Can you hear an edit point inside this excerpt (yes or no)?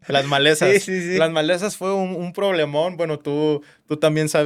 no